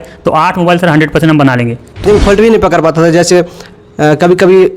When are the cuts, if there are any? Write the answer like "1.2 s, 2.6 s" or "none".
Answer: 2.1 s